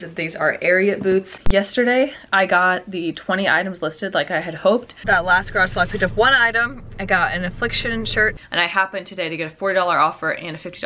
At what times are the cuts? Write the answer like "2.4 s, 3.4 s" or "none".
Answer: 1.4 s, 4.9 s, 8.4 s